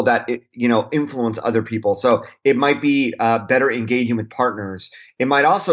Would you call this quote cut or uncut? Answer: uncut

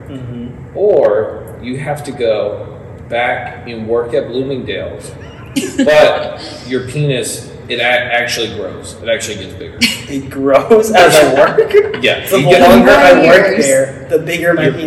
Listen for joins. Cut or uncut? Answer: uncut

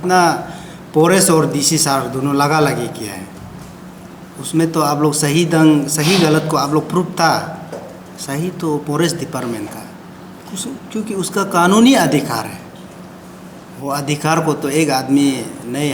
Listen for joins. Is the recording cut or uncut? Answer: uncut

